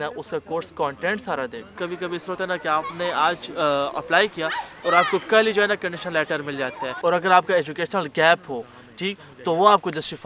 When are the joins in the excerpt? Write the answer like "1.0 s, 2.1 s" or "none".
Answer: 1.7 s, 6.9 s